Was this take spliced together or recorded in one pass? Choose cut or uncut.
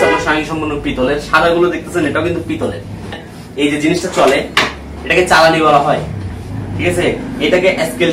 cut